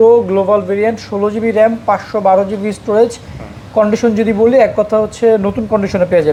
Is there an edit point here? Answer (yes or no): no